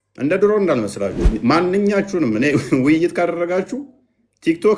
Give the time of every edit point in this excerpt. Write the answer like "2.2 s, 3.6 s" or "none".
1.2 s